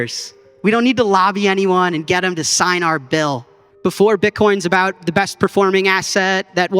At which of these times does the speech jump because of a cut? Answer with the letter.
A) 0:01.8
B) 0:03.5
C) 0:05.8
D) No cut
B